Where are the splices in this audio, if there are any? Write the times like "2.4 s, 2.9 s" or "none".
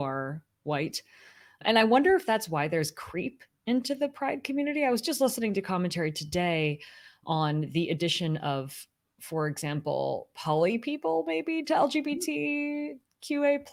none